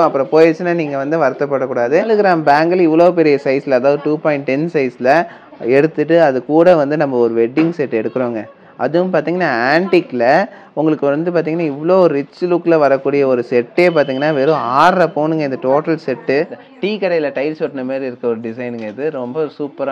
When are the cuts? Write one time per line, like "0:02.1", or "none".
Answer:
0:02.2
0:16.6